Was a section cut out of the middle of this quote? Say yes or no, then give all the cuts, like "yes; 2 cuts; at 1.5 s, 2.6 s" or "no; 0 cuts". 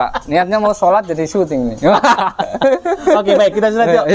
no; 0 cuts